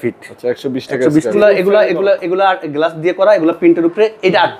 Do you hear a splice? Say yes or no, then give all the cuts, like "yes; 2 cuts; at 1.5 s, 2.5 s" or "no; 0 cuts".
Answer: yes; 1 cut; at 1.3 s